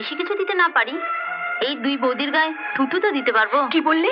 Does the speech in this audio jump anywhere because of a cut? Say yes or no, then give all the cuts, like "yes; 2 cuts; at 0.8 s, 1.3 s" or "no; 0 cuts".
no; 0 cuts